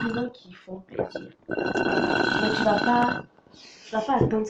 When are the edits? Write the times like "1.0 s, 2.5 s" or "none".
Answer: none